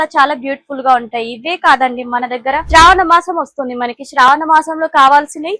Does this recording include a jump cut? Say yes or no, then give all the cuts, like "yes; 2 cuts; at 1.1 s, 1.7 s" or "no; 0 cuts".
yes; 1 cut; at 2.6 s